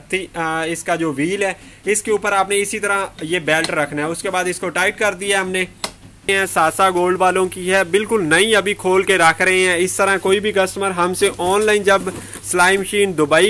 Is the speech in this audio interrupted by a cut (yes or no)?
yes